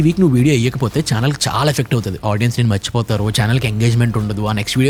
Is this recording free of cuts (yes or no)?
yes